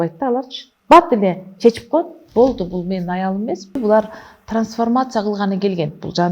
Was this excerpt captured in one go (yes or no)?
no